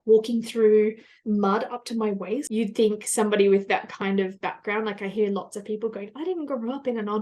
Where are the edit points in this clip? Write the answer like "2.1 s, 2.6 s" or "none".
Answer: 2.5 s